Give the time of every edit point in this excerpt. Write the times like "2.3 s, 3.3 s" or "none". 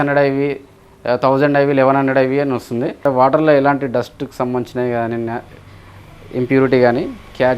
2.9 s